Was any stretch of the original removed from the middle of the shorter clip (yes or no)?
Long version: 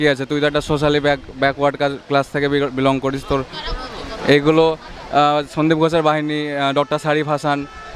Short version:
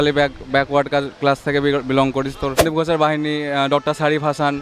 yes